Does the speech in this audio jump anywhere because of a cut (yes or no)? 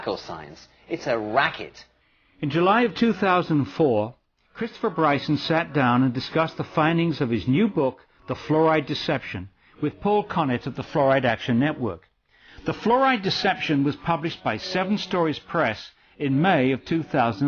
no